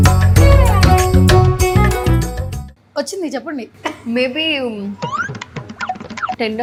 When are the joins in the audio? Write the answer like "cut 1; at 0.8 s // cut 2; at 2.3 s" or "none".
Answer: none